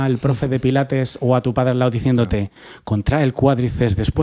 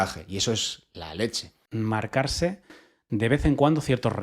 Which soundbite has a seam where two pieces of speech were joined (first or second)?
second